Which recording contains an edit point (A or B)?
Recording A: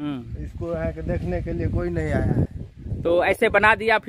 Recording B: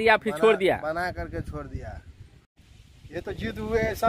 B